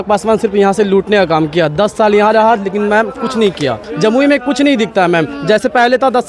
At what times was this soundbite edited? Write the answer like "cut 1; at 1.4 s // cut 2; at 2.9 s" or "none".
cut 1; at 3.9 s